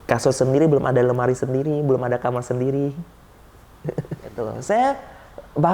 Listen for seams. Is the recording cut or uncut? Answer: cut